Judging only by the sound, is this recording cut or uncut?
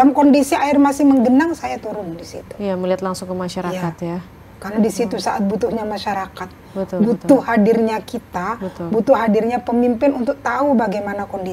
uncut